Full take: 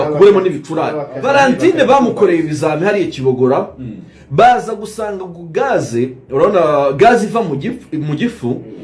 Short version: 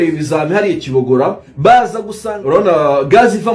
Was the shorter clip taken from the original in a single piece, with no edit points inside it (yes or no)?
no